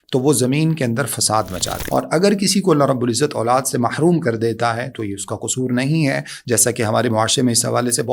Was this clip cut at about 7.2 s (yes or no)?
no